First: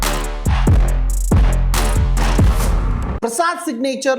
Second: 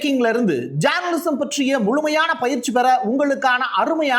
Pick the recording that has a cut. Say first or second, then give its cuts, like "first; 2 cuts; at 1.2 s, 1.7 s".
first; 1 cut; at 3.1 s